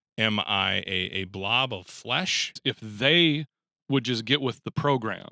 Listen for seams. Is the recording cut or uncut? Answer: cut